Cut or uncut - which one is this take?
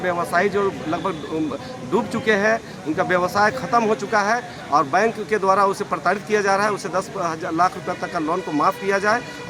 uncut